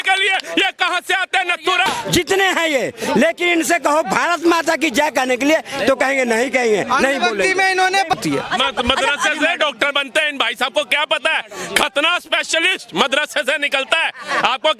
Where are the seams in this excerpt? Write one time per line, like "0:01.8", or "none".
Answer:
0:01.9
0:08.2